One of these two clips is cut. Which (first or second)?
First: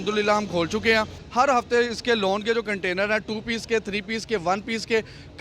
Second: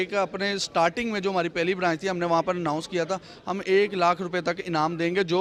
first